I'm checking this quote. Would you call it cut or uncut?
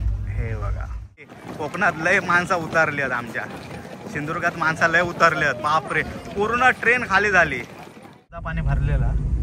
cut